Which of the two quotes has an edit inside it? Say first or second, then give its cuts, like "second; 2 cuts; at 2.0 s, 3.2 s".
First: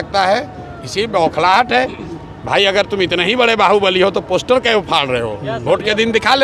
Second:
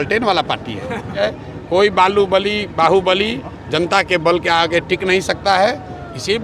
second; 1 cut; at 1.2 s